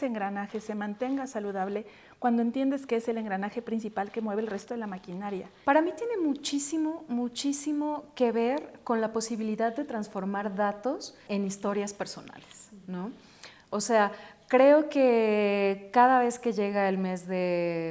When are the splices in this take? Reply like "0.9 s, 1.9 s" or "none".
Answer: 5.5 s, 11.2 s